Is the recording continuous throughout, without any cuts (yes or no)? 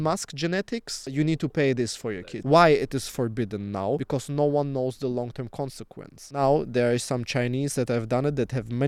no